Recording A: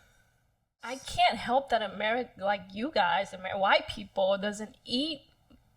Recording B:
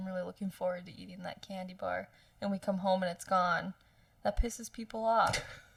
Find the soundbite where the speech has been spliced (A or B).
A